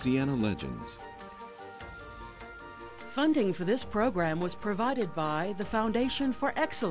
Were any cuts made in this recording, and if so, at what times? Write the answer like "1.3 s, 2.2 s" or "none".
3.0 s

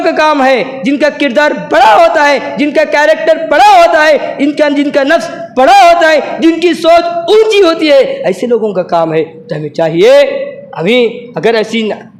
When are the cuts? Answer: none

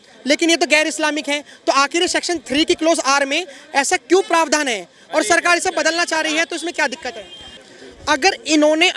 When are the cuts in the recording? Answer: 7.6 s

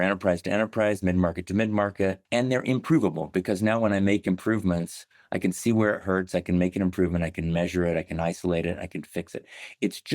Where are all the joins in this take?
2.2 s

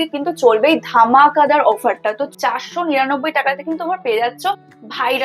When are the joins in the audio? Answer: 2.2 s

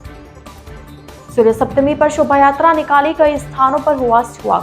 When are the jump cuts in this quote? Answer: 1.1 s

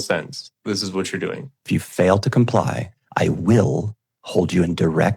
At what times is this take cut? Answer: 1.6 s

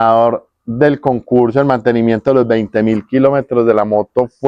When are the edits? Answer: none

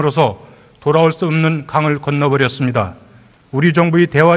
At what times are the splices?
none

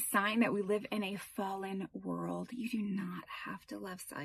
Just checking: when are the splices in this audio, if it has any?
none

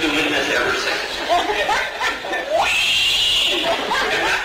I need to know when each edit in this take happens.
none

